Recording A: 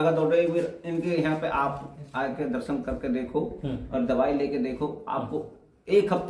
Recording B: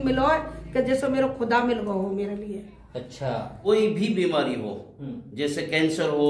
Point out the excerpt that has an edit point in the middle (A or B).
B